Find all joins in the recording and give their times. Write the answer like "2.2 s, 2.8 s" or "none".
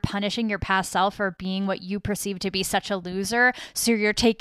none